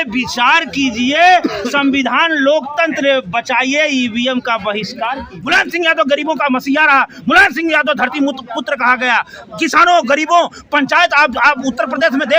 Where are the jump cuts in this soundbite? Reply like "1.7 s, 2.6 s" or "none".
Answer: 5.3 s